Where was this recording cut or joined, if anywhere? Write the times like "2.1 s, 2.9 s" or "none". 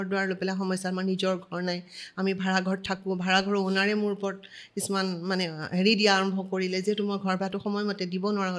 none